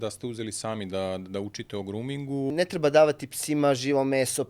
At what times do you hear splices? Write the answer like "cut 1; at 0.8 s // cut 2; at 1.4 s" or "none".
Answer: cut 1; at 2.5 s